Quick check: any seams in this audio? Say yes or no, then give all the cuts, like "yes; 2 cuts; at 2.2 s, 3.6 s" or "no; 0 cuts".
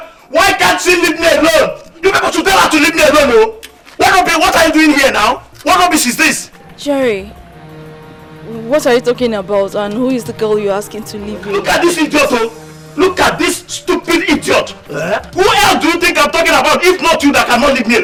no; 0 cuts